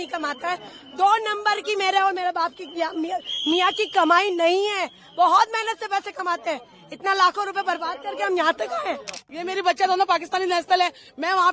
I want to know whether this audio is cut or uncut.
cut